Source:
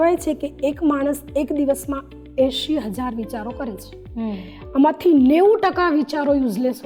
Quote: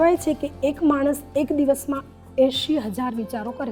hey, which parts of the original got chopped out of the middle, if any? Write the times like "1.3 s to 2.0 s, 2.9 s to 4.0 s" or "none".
none